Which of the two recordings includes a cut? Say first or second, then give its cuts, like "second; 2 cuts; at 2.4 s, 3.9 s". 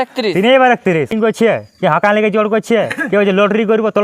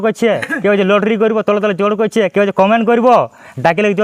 first; 1 cut; at 1.1 s